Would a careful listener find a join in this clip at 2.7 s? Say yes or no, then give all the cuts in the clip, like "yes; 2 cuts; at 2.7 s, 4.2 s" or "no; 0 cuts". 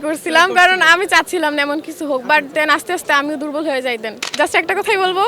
no; 1 cut; at 4.2 s